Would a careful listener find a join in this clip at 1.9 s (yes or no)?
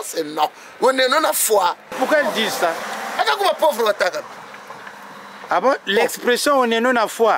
yes